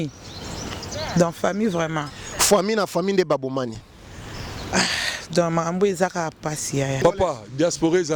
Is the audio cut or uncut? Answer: cut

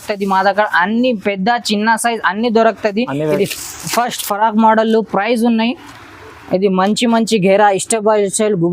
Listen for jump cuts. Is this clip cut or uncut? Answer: cut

